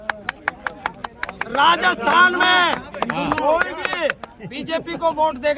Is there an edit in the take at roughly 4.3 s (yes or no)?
no